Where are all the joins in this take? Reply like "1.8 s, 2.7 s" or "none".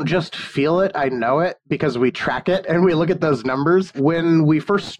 2.7 s, 4.0 s